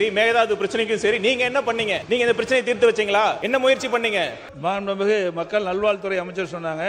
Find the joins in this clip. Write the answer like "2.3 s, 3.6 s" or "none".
2.0 s, 3.4 s, 4.4 s